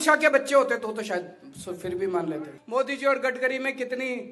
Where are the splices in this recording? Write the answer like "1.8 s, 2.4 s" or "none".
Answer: 2.6 s